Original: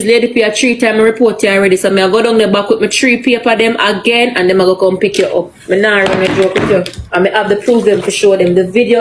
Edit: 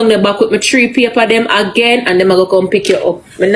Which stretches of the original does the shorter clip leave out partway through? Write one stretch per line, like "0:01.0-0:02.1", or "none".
none